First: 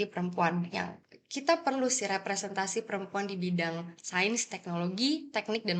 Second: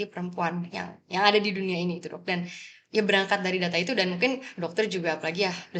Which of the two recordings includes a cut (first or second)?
first